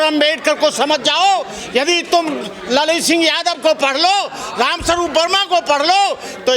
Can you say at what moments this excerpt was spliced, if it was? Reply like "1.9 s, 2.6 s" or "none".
none